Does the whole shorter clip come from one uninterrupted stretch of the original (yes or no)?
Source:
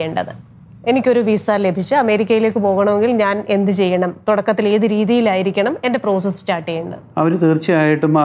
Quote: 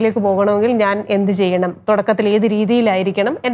yes